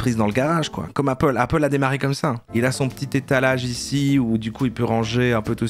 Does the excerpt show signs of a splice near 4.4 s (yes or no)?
yes